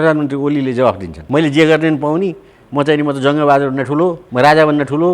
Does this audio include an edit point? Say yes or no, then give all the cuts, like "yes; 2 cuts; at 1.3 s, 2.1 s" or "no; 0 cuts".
yes; 2 cuts; at 1.1 s, 4.2 s